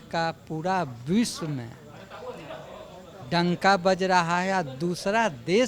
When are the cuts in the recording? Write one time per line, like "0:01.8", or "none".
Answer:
0:03.2